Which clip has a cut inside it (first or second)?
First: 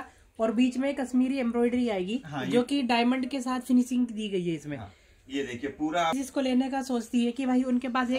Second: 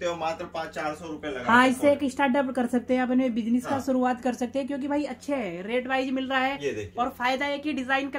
first